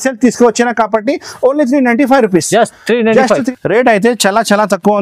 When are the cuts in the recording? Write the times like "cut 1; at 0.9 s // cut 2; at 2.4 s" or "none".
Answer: cut 1; at 3.5 s